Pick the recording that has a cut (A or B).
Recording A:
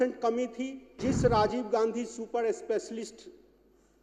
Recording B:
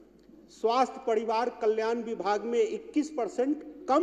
A